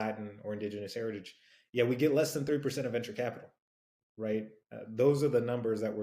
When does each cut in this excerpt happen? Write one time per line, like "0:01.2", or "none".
none